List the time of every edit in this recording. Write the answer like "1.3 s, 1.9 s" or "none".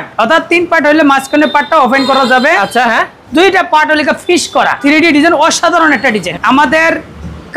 4.8 s, 6.3 s

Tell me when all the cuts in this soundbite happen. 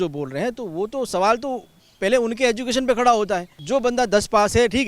3.5 s

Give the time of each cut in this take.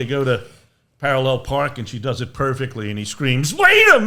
none

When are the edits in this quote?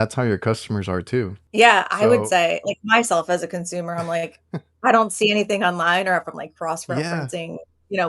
1.4 s

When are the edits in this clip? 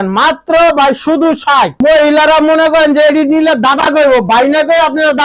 1.7 s

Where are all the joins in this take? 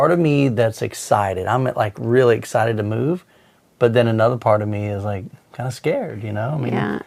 none

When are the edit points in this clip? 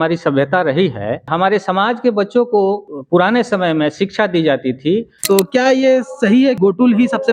1.3 s, 2.9 s, 5.2 s, 6.6 s

